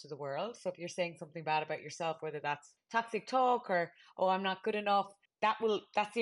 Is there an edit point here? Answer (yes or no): yes